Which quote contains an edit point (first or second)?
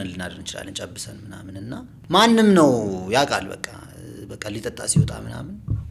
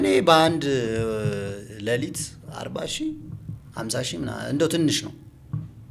first